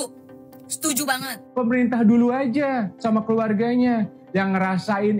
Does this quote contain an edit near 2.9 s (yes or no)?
no